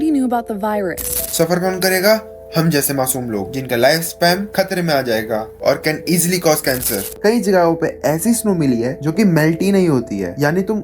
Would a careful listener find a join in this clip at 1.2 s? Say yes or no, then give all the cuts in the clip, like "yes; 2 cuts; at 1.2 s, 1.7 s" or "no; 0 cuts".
yes; 2 cuts; at 1.2 s, 7.0 s